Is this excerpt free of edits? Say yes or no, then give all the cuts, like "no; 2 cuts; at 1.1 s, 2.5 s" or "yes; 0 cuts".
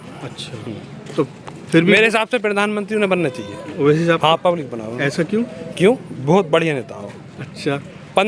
yes; 0 cuts